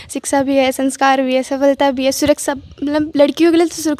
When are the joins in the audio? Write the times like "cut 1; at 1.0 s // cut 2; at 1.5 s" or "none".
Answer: none